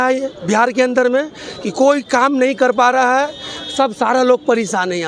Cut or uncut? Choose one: uncut